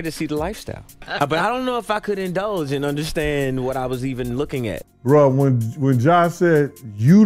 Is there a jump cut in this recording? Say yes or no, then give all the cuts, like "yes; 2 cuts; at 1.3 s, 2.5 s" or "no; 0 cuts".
yes; 2 cuts; at 0.9 s, 4.8 s